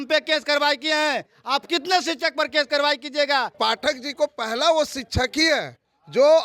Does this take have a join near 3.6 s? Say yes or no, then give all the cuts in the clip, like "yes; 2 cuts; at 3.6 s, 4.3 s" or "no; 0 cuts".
yes; 1 cut; at 3.6 s